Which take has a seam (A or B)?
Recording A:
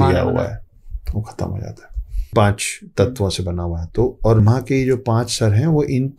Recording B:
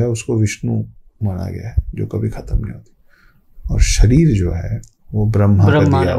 A